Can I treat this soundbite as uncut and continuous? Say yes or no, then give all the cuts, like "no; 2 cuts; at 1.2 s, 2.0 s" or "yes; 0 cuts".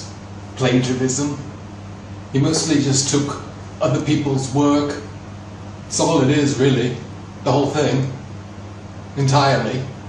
yes; 0 cuts